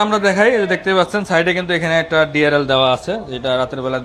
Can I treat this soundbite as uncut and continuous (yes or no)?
yes